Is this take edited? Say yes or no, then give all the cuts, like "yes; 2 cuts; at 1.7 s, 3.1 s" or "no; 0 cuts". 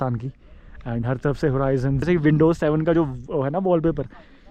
yes; 1 cut; at 2.0 s